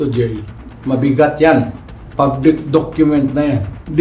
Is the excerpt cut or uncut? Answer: uncut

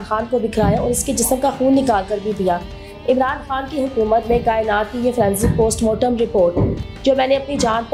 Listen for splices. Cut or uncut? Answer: uncut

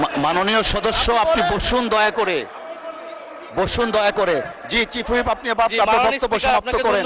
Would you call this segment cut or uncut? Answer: uncut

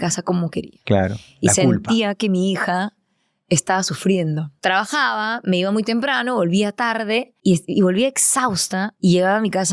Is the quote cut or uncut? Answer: cut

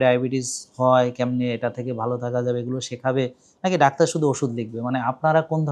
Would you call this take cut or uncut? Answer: uncut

